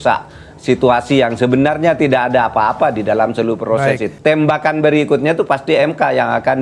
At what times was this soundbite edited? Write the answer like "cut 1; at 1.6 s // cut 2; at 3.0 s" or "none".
cut 1; at 4.1 s